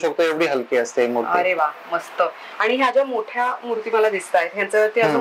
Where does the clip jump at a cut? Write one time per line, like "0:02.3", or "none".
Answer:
none